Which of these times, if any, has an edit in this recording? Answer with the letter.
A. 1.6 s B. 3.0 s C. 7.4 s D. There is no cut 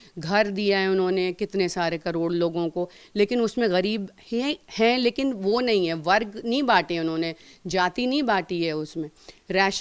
D